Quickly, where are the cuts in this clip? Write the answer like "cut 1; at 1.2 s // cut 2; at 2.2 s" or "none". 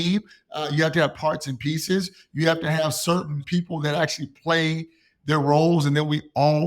cut 1; at 3.4 s

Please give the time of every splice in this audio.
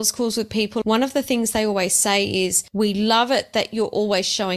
cut 1; at 0.8 s // cut 2; at 2.6 s

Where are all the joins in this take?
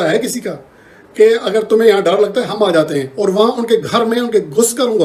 none

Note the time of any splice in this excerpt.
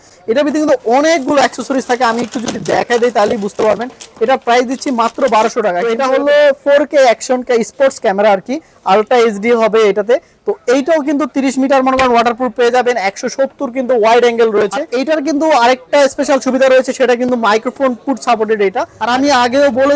cut 1; at 5.8 s // cut 2; at 14.9 s // cut 3; at 19.0 s

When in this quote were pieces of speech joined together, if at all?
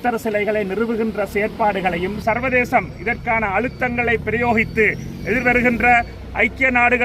cut 1; at 2.2 s

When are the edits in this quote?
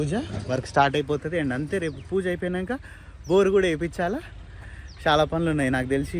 none

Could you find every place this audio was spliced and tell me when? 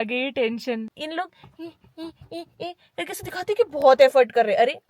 cut 1; at 1.0 s

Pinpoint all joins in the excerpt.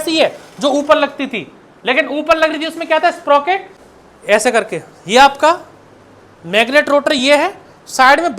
cut 1; at 3.7 s

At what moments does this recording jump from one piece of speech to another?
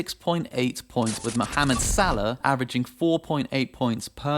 cut 1; at 1.2 s

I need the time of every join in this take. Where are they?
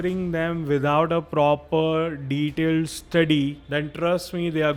none

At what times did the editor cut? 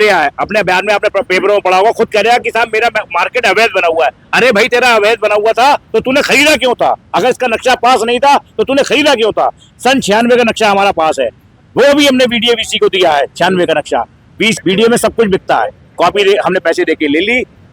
cut 1; at 14.6 s

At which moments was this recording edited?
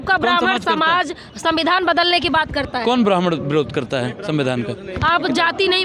cut 1; at 4.9 s

